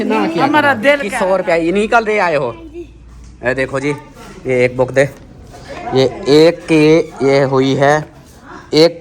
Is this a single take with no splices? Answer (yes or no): no